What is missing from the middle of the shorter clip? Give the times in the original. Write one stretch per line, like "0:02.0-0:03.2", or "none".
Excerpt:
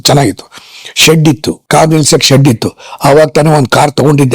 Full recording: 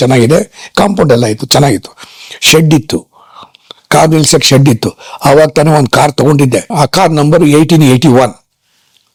0:03.1-0:03.8